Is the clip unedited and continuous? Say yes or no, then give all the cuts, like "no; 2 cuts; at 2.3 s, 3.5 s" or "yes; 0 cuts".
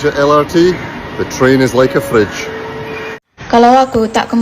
no; 1 cut; at 3.0 s